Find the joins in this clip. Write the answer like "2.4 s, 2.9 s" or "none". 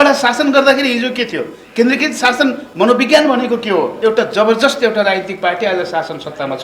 3.9 s